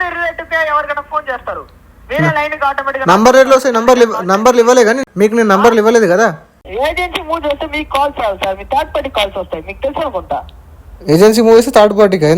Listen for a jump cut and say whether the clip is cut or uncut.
cut